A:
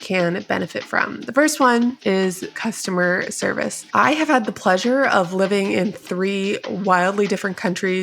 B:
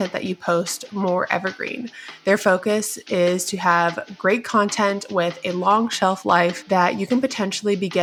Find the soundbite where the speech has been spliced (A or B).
A